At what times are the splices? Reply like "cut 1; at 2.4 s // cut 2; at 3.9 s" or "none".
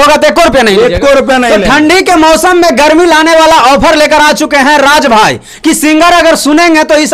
none